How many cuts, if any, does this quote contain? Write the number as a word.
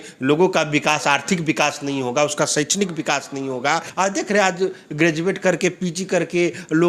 one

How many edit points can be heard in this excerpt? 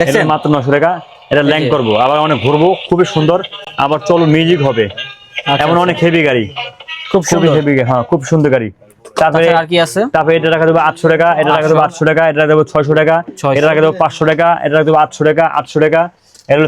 zero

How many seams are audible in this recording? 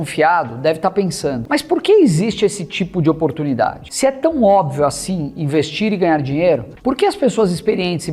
three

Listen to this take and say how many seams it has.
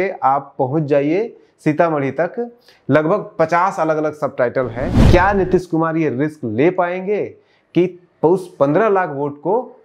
one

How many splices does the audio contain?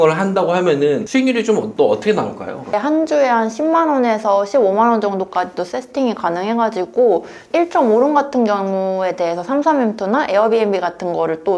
one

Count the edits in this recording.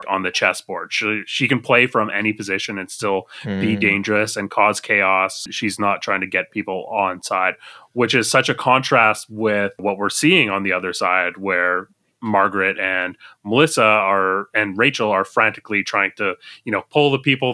two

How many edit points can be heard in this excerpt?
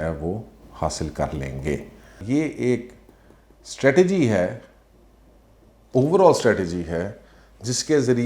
one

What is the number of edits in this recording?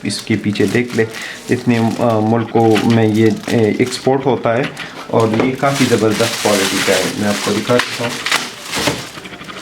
zero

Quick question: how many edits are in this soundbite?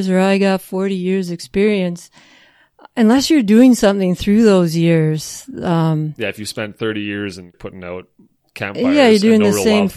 one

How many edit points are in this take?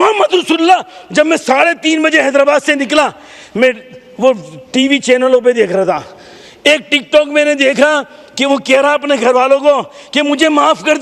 zero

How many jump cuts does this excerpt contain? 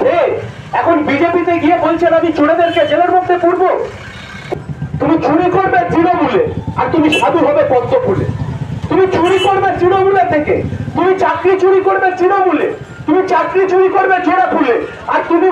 one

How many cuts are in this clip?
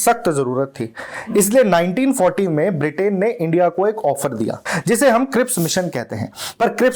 one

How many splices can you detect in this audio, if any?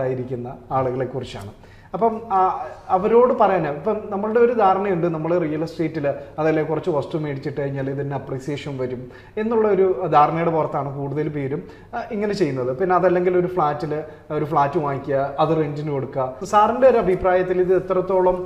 one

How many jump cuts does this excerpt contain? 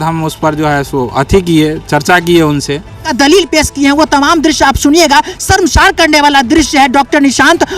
one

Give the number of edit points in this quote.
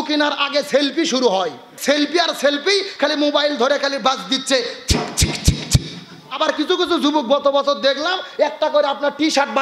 two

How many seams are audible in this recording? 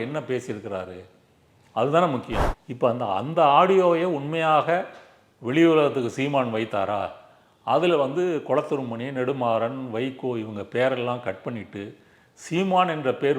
one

